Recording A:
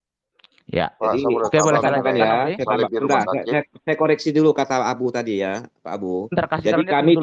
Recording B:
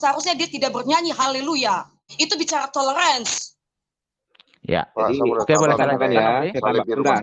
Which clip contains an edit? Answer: B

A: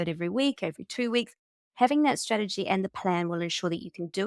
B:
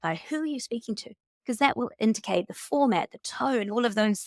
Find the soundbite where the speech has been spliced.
B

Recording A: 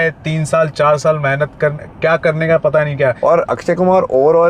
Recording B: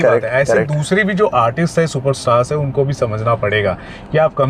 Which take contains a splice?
A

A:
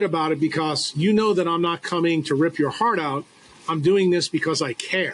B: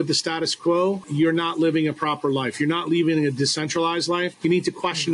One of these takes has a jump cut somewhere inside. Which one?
B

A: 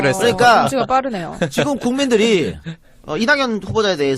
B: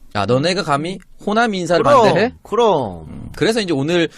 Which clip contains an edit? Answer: B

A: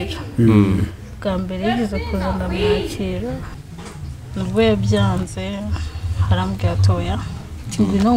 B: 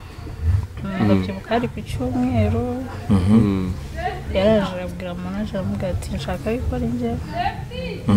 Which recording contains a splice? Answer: A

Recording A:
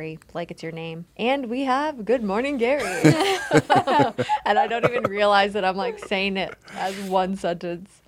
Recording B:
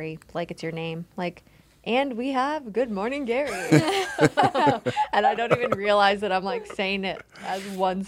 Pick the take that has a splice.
A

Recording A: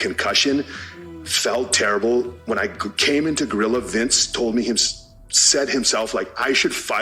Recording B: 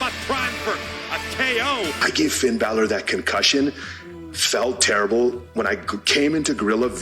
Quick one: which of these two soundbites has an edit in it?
B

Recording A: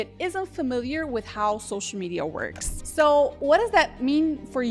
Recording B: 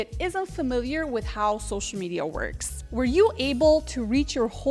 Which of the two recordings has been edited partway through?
A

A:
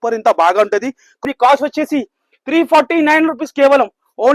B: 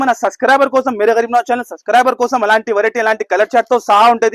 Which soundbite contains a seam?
A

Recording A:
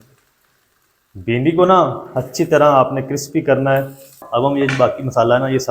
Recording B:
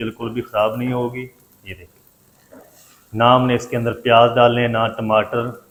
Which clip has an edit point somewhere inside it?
A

